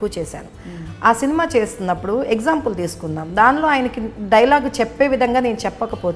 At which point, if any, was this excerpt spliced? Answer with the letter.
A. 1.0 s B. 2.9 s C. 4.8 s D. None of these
D